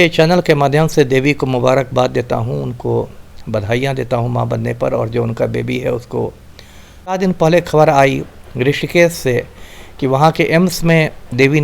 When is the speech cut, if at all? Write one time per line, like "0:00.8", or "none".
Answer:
0:07.2